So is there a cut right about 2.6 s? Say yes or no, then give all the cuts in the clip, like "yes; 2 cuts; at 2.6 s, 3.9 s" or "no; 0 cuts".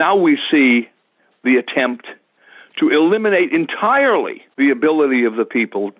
no; 1 cut; at 4.4 s